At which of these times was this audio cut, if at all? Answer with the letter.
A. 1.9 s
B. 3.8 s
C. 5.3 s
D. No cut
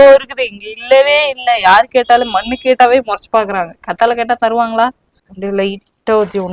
C